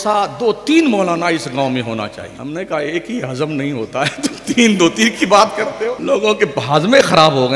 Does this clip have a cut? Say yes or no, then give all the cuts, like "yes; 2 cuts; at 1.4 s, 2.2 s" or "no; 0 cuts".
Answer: yes; 2 cuts; at 2.3 s, 6.0 s